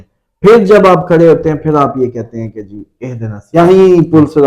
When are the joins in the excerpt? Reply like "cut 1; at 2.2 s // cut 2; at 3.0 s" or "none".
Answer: cut 1; at 3.6 s